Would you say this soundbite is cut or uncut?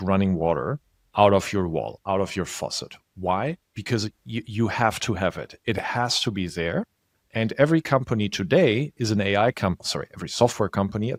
uncut